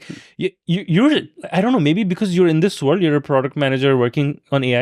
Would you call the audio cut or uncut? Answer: uncut